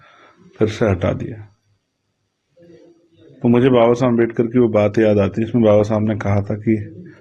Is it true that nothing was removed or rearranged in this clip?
yes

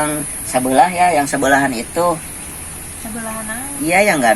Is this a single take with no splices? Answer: yes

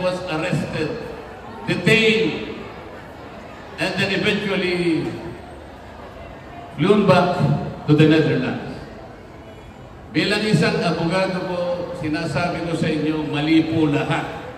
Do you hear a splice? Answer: no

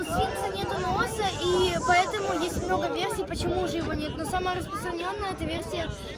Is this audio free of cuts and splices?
yes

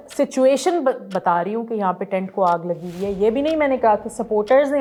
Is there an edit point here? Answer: no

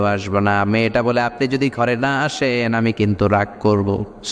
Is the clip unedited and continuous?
yes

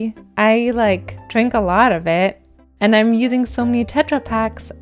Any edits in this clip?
yes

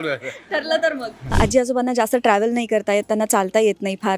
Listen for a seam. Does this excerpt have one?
yes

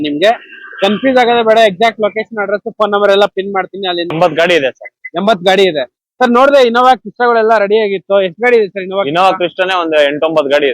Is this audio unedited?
no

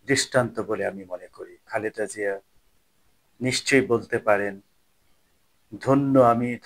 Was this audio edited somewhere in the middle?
yes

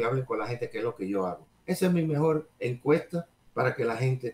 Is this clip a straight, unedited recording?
no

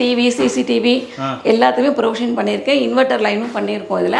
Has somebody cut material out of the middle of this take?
no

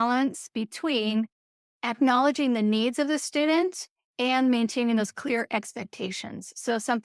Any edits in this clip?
no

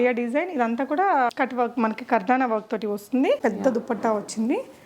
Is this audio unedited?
no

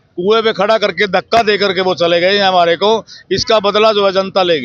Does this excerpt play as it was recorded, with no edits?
yes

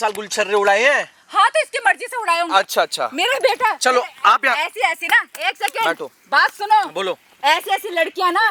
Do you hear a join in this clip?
no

